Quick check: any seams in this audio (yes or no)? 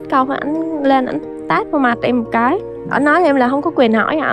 no